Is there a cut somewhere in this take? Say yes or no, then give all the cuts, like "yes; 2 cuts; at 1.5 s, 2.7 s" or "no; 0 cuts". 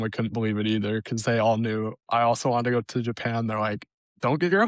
no; 0 cuts